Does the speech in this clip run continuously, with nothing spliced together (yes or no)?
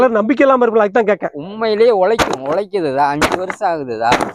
yes